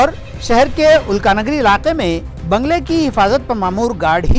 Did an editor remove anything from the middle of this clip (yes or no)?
no